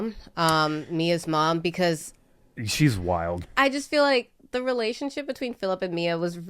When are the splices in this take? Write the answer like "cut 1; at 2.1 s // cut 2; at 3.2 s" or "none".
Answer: cut 1; at 3.4 s

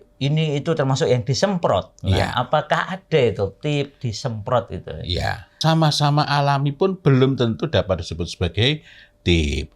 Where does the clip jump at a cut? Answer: cut 1; at 5.5 s

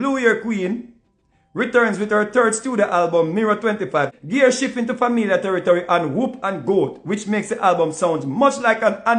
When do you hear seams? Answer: cut 1; at 4.1 s

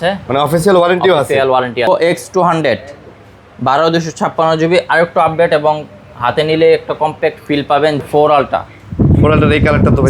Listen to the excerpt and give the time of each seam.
cut 1; at 1.9 s // cut 2; at 8.0 s

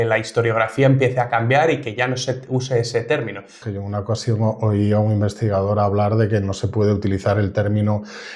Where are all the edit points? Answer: cut 1; at 3.6 s

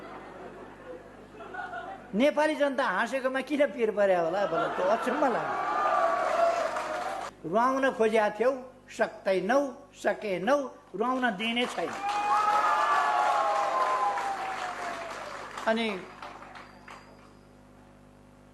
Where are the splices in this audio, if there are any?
cut 1; at 7.3 s

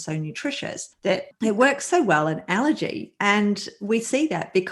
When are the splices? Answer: cut 1; at 1.2 s

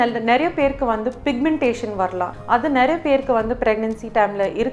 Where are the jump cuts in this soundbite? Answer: cut 1; at 2.3 s

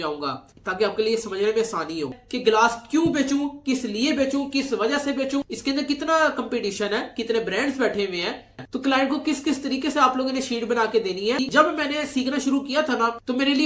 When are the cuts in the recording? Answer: cut 1; at 2.2 s // cut 2; at 8.6 s // cut 3; at 11.4 s

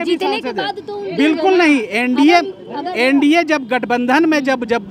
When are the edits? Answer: none

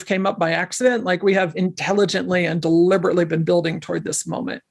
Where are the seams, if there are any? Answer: none

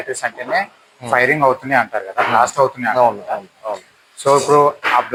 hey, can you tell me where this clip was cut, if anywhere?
none

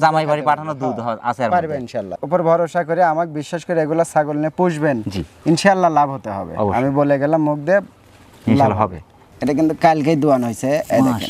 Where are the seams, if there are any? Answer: cut 1; at 2.2 s // cut 2; at 9.3 s

